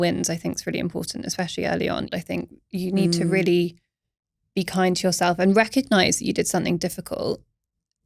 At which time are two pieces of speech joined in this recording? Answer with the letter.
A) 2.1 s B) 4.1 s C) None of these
A